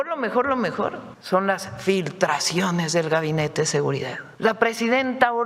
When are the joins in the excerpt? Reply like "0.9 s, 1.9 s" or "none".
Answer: 1.1 s, 4.2 s